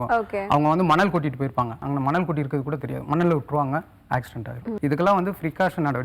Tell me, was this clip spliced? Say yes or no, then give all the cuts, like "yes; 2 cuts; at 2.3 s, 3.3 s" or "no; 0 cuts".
yes; 2 cuts; at 1.8 s, 4.6 s